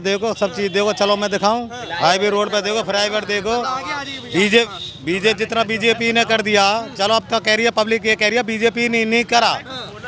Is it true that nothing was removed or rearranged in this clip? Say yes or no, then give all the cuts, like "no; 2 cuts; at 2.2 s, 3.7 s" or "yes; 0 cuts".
yes; 0 cuts